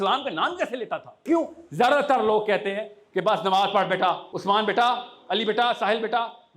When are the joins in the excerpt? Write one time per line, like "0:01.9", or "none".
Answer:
0:01.2
0:04.3